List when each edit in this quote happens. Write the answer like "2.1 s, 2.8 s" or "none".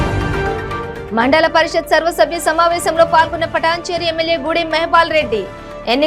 1.0 s